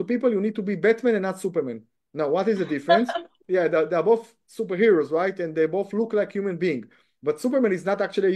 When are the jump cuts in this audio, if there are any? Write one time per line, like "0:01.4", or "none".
0:03.4